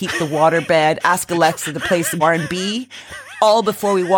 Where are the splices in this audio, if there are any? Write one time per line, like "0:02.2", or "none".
0:02.2

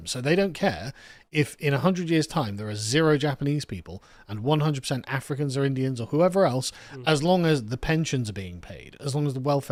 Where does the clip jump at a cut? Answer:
none

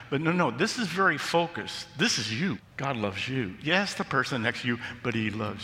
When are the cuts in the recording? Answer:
0:02.7

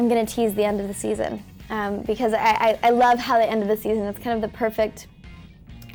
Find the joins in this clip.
none

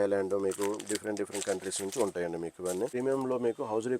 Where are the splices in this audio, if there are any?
0:02.9

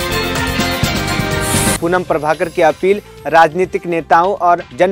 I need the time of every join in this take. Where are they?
0:01.8

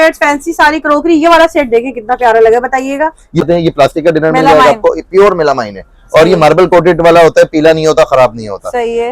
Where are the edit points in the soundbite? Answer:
0:03.5

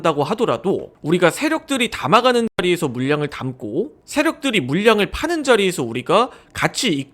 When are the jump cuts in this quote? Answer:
none

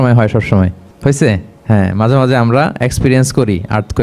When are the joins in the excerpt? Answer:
0:00.9
0:01.5

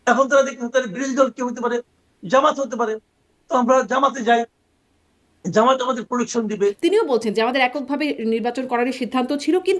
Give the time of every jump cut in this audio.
0:06.8

